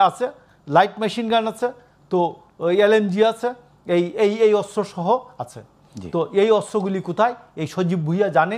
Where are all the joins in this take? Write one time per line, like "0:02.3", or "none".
none